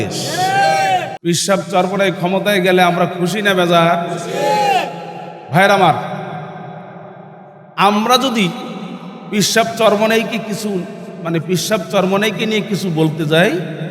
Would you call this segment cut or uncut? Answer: cut